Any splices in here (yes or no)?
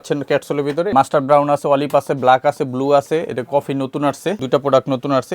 yes